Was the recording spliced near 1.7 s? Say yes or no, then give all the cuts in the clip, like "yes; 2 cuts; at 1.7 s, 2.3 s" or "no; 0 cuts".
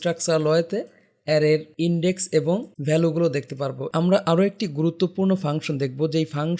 yes; 3 cuts; at 1.7 s, 2.7 s, 3.8 s